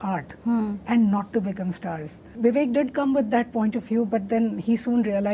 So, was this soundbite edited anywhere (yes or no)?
yes